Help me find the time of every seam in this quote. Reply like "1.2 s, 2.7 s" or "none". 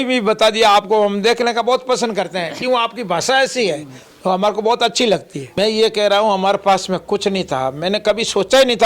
5.5 s